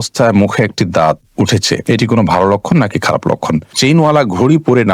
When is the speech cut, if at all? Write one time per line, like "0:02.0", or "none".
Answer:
0:01.8
0:03.8